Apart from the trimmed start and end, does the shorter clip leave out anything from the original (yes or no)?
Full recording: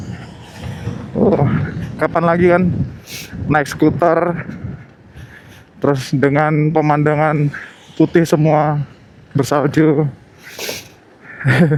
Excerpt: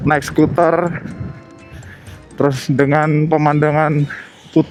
no